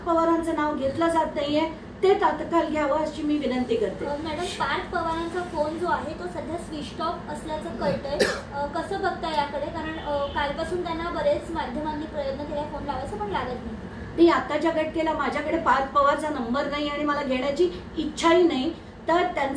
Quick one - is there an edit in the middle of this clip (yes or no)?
no